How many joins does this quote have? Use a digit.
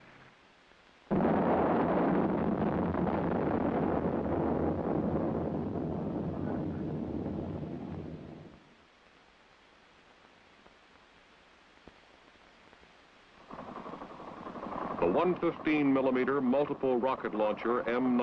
1